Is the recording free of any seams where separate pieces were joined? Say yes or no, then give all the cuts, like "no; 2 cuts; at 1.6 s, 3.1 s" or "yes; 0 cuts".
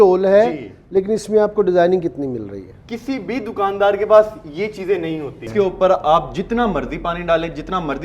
no; 1 cut; at 5.4 s